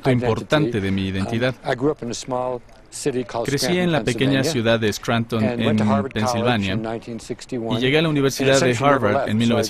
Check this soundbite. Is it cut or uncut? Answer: uncut